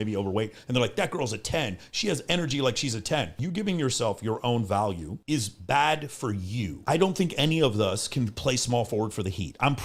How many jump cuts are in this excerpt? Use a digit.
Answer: 2